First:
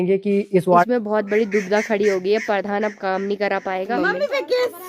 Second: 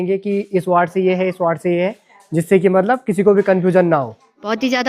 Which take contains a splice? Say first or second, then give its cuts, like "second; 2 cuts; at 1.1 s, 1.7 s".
first; 2 cuts; at 0.9 s, 3.9 s